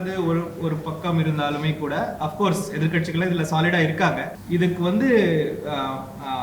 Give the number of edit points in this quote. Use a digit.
1